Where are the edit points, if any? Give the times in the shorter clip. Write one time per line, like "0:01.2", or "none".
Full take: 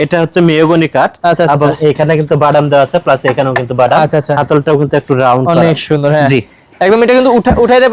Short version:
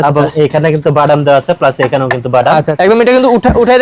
0:02.7